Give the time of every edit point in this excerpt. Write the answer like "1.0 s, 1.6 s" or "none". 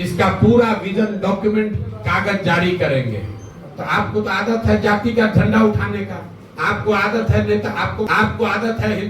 3.7 s, 8.1 s